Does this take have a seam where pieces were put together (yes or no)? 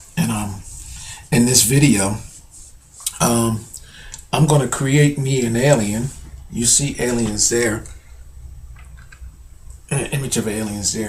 no